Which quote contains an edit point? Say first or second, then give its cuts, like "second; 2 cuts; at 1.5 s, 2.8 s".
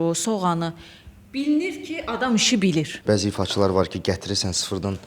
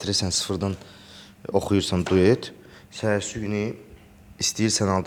first; 1 cut; at 2.9 s